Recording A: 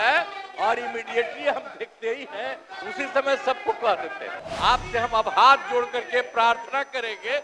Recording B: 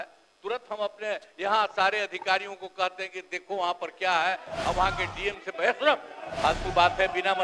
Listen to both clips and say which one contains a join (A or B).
A